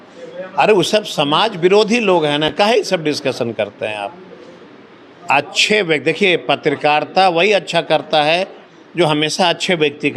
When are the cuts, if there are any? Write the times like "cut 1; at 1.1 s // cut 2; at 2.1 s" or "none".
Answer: none